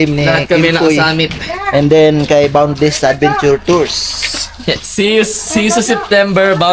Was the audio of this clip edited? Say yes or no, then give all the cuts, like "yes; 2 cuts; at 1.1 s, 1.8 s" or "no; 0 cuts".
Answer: no; 0 cuts